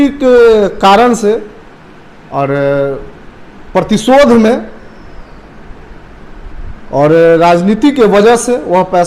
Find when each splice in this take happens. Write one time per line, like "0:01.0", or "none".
none